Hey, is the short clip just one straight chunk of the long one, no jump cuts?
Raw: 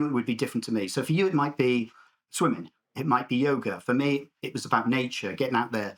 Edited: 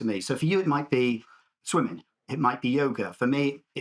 yes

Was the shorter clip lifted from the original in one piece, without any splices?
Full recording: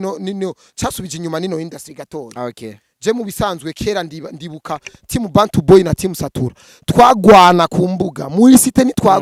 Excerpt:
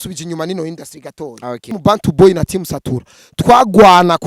no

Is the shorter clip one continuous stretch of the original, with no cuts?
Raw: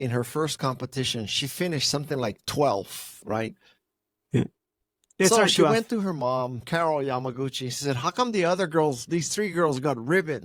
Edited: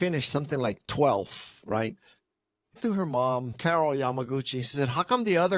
no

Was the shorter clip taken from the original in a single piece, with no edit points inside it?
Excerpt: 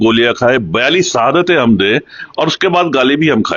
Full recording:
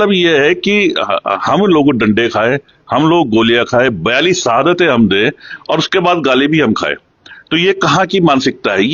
yes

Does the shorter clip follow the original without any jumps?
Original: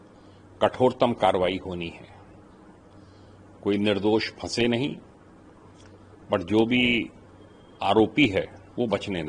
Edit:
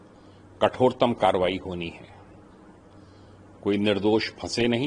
yes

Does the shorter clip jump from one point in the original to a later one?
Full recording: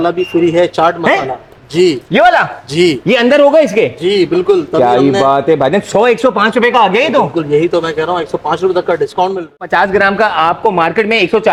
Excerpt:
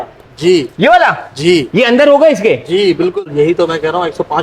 yes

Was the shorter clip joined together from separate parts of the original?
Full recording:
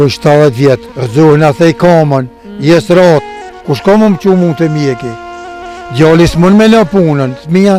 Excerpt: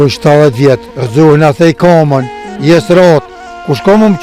no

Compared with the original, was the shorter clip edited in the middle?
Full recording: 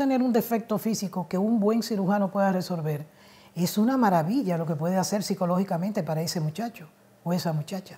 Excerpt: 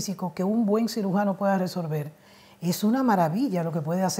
no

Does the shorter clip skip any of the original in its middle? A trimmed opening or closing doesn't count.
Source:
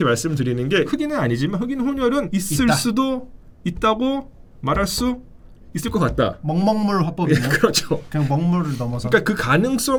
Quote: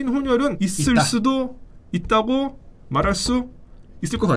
no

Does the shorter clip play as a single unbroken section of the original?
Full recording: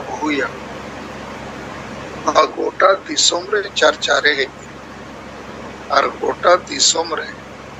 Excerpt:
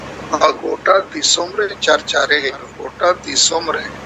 no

